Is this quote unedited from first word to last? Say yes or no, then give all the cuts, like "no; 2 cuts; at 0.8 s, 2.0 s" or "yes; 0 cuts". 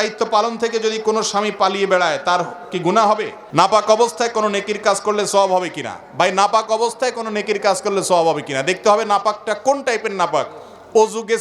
no; 1 cut; at 3.4 s